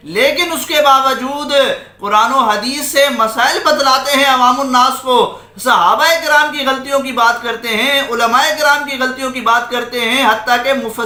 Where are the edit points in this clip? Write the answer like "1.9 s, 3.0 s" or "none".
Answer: none